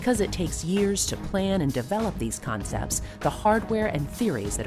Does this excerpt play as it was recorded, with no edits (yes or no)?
yes